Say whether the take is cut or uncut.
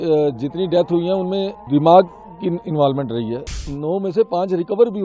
cut